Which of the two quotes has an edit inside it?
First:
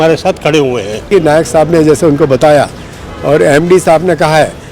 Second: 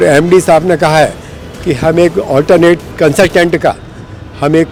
first; 1 cut; at 1.1 s

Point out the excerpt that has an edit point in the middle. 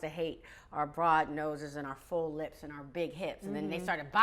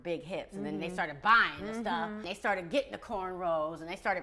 second; 1 cut; at 2.3 s

